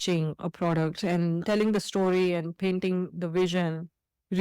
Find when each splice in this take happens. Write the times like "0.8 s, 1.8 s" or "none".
1.4 s